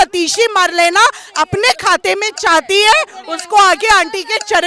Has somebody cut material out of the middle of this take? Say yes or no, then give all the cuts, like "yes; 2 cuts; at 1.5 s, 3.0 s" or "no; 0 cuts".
no; 0 cuts